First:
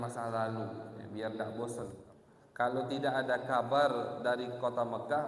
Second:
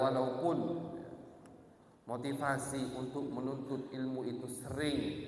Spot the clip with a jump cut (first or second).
first